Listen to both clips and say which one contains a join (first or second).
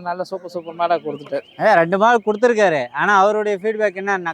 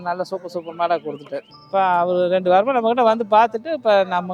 second